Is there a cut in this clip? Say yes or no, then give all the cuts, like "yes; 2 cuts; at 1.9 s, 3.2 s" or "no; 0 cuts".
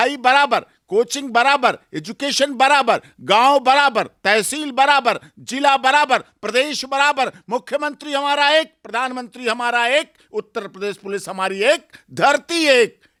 no; 0 cuts